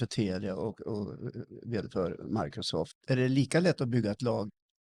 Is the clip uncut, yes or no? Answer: no